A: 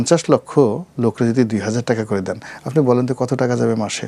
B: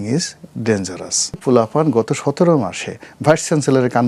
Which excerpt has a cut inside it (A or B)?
B